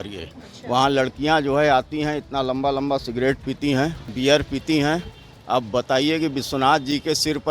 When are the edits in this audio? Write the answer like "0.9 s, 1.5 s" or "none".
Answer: 4.0 s